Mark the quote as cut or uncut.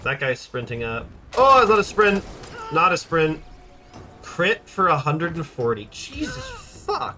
uncut